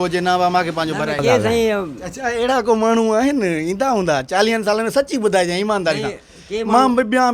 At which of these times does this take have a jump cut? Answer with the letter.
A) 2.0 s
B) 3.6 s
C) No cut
A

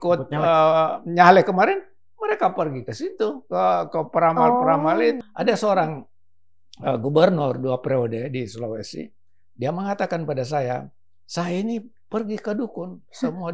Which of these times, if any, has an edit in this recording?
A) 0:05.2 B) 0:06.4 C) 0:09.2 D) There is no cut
A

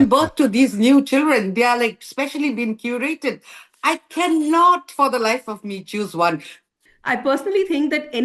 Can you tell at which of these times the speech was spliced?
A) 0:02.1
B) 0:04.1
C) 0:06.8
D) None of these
C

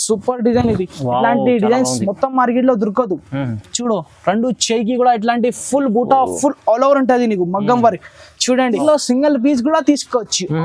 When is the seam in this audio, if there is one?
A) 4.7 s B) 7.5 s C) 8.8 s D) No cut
C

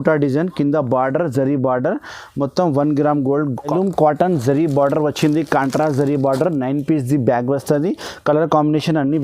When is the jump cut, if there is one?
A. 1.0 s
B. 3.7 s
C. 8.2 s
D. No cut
B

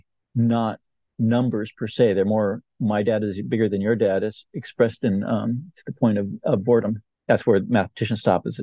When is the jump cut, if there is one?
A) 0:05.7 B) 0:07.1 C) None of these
B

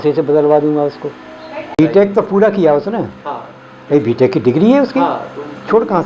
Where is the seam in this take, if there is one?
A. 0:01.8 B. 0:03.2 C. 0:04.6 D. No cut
A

